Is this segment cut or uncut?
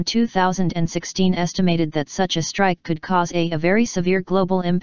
uncut